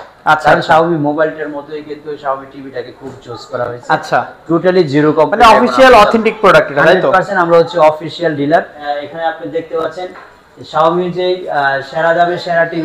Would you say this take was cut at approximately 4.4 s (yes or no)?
no